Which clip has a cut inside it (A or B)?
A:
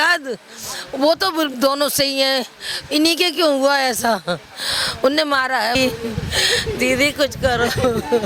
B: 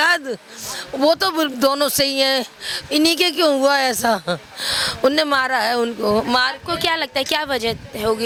A